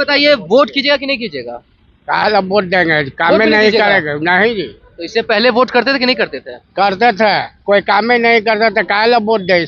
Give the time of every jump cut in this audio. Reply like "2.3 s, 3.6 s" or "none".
none